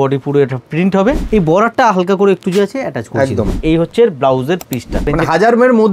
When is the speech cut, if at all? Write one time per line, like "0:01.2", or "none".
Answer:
0:01.2
0:03.6
0:05.1